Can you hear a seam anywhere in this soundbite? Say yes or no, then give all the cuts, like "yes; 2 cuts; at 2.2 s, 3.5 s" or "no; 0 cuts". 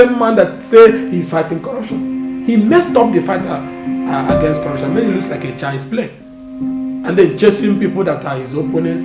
no; 0 cuts